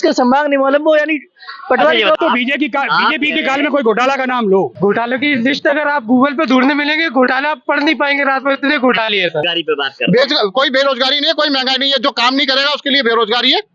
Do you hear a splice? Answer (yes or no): yes